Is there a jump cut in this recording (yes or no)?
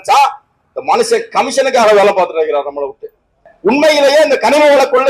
yes